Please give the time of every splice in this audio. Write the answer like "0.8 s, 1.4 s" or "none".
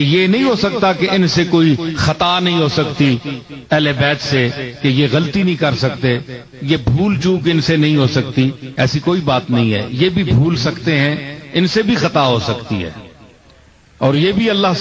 none